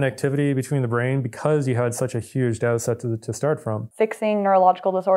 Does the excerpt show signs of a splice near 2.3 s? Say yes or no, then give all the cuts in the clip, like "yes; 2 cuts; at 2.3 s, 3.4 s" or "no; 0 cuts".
no; 1 cut; at 3.8 s